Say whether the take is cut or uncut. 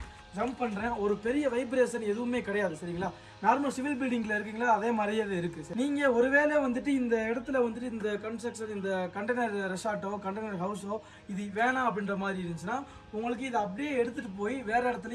uncut